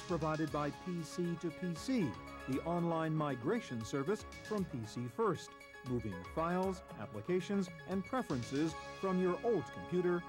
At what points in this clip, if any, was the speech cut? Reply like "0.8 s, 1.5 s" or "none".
none